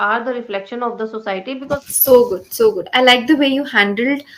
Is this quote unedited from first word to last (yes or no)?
no